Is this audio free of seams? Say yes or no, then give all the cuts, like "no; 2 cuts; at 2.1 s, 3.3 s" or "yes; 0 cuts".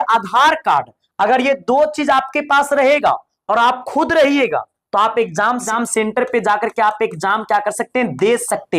no; 1 cut; at 5.7 s